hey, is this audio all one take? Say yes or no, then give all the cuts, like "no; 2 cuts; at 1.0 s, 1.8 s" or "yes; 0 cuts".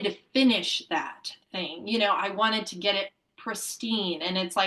yes; 0 cuts